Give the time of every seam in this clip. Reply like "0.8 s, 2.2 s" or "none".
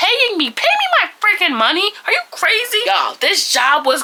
none